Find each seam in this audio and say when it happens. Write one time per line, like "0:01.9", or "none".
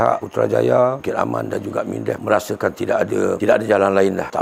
none